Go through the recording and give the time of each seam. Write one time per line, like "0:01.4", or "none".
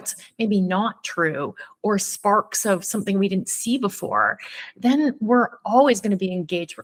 none